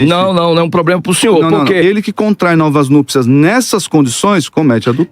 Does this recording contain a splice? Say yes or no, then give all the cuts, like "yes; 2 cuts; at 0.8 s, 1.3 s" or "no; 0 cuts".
yes; 1 cut; at 1.8 s